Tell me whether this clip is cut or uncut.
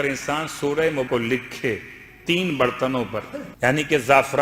cut